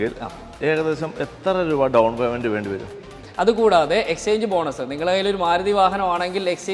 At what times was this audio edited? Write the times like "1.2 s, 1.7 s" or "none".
3.2 s